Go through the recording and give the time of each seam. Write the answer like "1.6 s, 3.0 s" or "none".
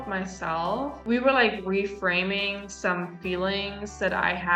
1.0 s